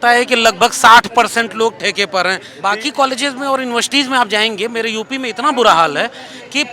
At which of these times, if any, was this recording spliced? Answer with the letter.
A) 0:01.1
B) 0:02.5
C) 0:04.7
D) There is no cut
B